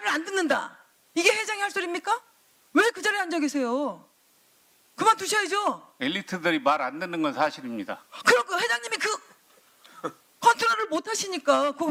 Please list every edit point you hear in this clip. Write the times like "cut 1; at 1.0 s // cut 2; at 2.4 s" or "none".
none